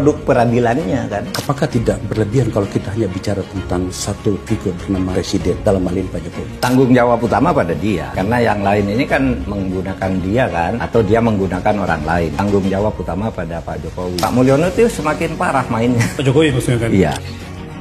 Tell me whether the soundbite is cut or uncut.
uncut